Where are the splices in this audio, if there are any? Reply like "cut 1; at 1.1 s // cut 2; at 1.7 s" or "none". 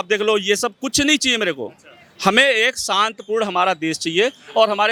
none